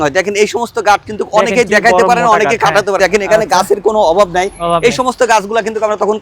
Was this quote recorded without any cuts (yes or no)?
no